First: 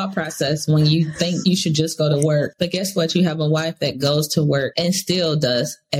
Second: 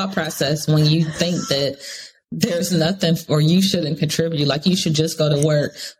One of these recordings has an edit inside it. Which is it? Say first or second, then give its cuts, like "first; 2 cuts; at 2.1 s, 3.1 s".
first; 3 cuts; at 1.4 s, 2.5 s, 4.7 s